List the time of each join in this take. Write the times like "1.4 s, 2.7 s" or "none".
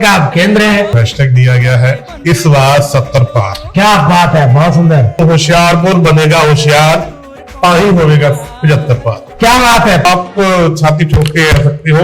0.9 s, 5.2 s, 10.0 s